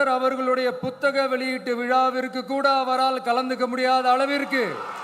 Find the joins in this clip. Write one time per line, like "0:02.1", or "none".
none

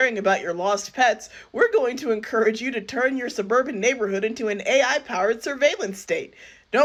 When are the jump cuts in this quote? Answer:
none

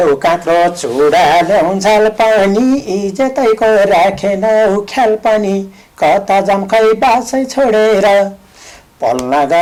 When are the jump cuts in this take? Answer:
none

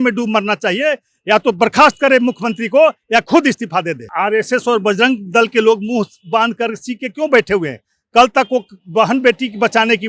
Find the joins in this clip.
0:04.1

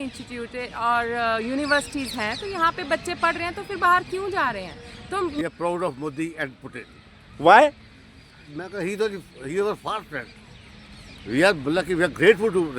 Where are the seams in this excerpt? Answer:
0:05.4

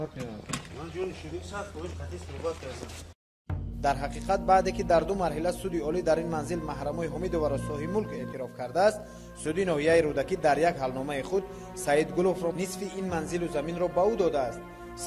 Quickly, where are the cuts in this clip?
none

